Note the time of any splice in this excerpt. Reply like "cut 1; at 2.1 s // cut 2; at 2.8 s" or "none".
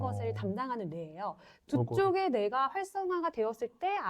cut 1; at 1.5 s